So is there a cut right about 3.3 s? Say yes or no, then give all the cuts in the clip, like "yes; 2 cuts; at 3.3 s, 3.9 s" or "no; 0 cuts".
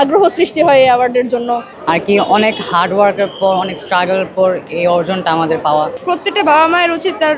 no; 2 cuts; at 1.7 s, 6.0 s